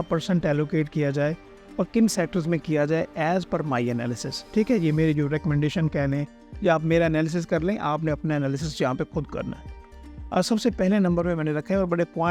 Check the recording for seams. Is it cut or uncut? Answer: uncut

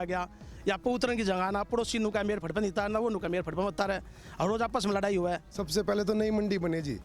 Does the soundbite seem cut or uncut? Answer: cut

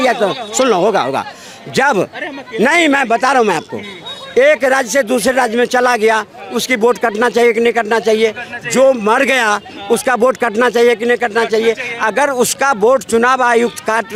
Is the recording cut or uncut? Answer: uncut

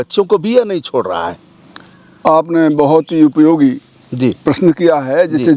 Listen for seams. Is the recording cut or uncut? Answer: uncut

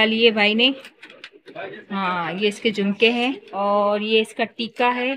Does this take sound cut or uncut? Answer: cut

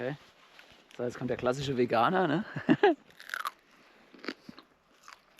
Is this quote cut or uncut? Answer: uncut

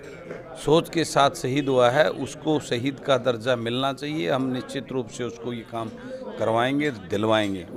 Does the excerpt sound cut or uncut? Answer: uncut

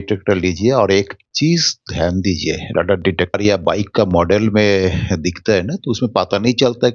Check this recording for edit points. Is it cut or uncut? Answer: cut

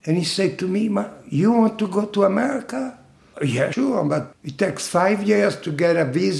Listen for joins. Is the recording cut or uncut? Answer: uncut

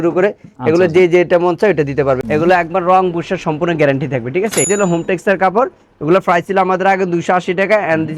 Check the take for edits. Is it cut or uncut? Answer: cut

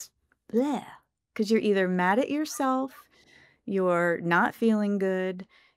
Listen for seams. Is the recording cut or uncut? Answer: uncut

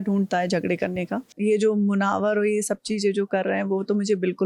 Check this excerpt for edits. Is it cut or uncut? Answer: cut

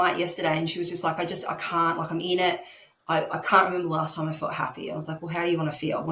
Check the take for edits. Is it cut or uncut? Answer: uncut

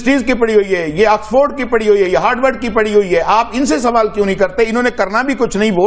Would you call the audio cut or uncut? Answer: uncut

